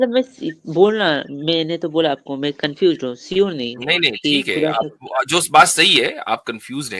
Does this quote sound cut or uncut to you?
uncut